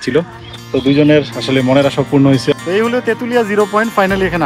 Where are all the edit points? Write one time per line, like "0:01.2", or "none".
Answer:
0:02.5